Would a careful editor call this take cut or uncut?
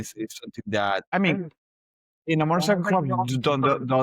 cut